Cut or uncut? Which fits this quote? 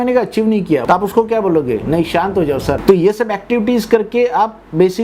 cut